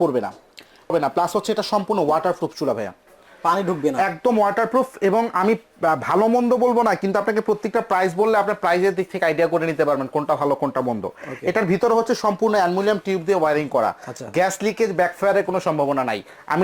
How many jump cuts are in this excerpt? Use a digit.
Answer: 1